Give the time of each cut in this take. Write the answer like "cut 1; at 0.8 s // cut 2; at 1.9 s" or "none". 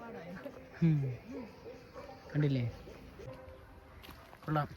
cut 1; at 3.3 s